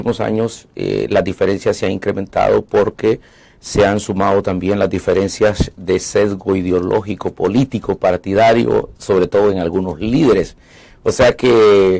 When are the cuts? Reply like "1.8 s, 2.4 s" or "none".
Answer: 5.0 s